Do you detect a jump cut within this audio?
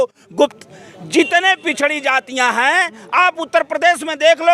no; 0 cuts

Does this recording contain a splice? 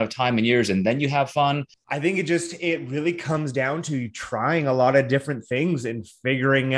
yes; 1 cut; at 1.7 s

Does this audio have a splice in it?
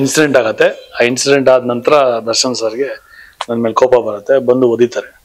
no; 0 cuts

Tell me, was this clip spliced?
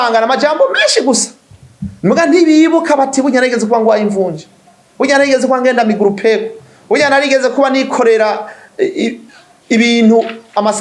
no; 0 cuts

